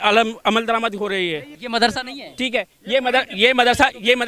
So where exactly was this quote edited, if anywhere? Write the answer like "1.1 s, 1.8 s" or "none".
1.5 s